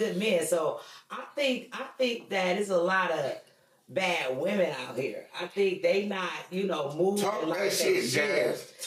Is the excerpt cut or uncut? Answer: uncut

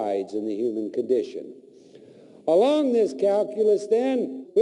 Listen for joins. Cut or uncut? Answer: uncut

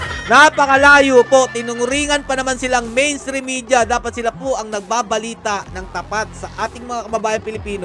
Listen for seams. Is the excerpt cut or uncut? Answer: uncut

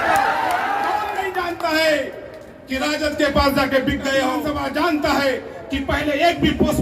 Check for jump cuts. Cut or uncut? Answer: cut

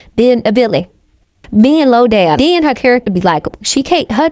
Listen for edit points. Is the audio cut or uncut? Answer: cut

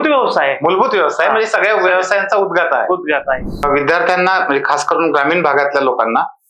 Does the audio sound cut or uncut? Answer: cut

